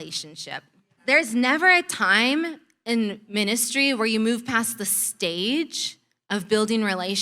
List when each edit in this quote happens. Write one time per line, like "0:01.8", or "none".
0:01.0